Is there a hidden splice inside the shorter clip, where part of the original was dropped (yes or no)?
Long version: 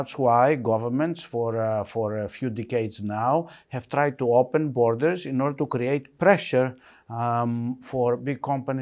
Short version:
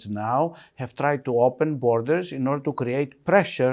no